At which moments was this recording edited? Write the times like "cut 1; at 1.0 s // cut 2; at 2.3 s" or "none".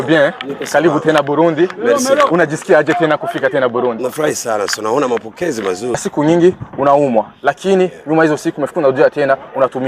cut 1; at 6.0 s